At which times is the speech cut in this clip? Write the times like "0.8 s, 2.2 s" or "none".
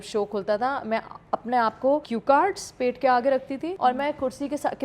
2.1 s, 3.7 s